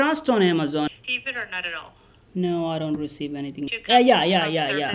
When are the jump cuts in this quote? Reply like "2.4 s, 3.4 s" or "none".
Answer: 0.9 s, 3.8 s